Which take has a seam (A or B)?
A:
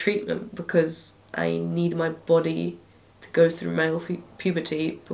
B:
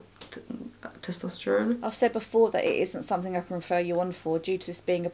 B